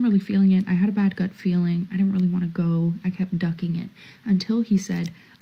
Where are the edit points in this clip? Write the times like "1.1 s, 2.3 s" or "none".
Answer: none

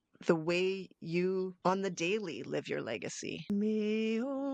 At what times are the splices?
1.5 s, 3.4 s

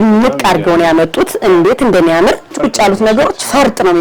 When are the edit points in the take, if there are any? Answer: 2.5 s

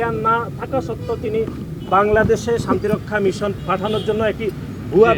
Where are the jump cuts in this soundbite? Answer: 3.6 s

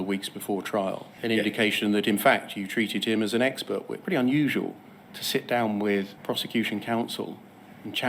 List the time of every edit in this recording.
3.9 s, 6.1 s

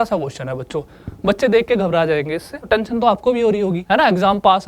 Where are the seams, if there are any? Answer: 2.6 s, 3.8 s

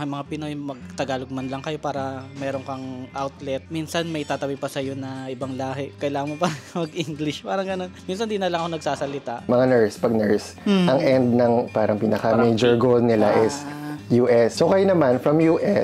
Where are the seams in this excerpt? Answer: 3.7 s, 7.9 s, 9.5 s, 14.5 s

